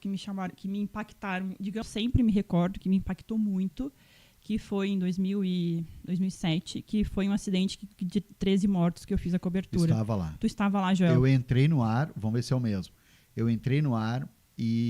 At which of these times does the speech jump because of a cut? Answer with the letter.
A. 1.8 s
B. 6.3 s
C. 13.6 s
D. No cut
A